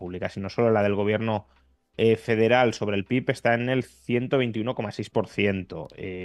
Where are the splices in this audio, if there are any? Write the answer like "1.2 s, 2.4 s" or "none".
none